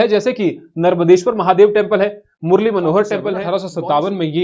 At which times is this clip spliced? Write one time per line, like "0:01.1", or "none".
0:03.4